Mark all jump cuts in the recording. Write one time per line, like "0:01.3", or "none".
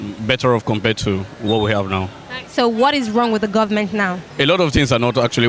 0:04.3